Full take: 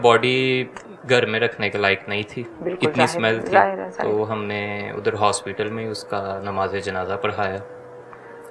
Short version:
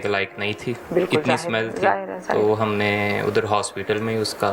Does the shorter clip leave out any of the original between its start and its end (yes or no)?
no